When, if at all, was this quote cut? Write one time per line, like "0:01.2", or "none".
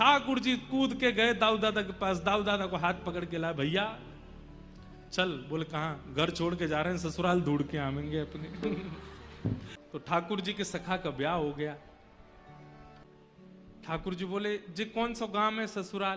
0:09.8
0:13.0

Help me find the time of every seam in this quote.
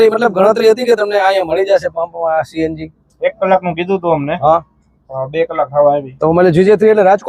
none

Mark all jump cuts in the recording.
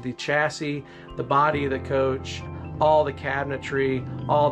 0:02.6

